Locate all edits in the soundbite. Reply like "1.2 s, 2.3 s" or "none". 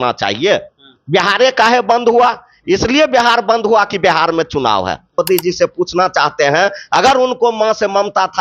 5.1 s